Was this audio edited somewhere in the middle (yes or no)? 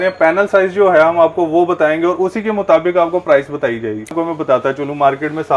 yes